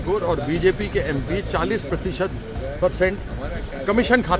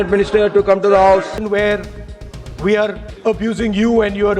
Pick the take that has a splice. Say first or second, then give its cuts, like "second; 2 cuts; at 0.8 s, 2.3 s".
second; 2 cuts; at 1.4 s, 3.1 s